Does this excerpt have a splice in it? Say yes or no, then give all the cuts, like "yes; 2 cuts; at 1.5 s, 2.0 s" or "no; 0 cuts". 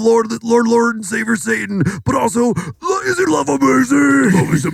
no; 0 cuts